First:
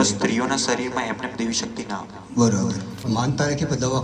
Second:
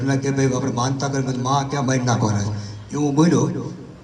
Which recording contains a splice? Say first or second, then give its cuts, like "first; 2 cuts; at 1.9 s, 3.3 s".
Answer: first; 1 cut; at 3.0 s